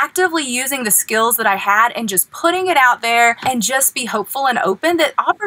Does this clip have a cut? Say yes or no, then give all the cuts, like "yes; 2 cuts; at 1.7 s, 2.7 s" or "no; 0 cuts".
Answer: yes; 1 cut; at 3.4 s